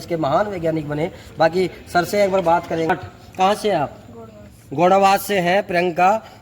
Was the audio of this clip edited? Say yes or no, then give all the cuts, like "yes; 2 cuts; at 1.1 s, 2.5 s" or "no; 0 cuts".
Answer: yes; 1 cut; at 2.9 s